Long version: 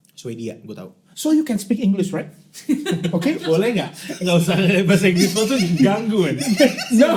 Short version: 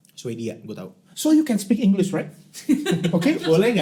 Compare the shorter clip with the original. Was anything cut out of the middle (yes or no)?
no